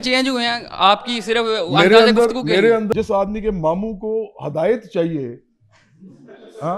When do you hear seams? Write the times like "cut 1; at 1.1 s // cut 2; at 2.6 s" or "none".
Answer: cut 1; at 2.9 s

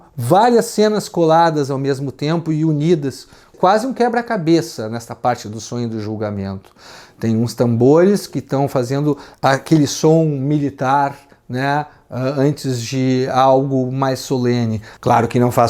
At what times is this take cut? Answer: none

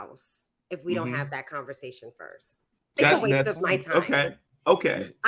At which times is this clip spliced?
none

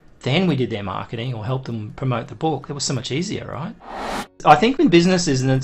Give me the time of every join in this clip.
cut 1; at 4.4 s

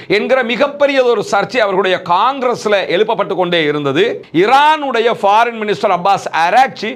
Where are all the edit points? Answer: cut 1; at 4.2 s

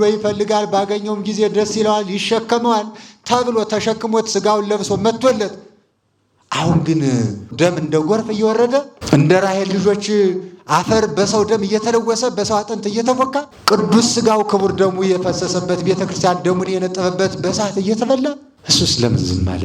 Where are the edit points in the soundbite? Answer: cut 1; at 7.5 s // cut 2; at 9.0 s // cut 3; at 13.5 s // cut 4; at 18.5 s

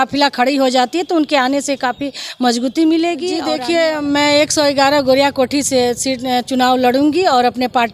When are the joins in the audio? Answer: cut 1; at 3.5 s

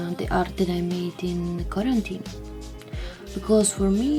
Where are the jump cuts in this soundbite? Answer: none

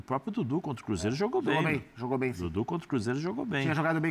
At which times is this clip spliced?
none

